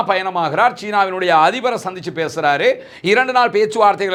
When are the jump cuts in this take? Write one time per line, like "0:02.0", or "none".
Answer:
none